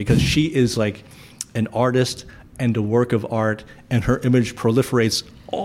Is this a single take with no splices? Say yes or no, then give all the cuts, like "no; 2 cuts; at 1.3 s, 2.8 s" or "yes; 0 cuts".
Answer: yes; 0 cuts